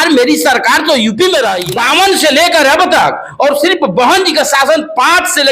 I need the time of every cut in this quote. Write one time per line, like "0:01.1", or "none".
0:01.6